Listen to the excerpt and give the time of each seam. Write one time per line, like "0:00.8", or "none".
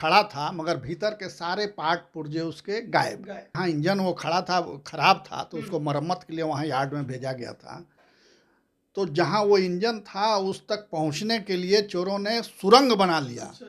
0:03.4